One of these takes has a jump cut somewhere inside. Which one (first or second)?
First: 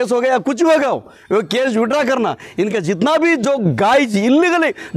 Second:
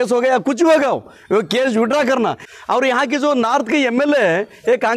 second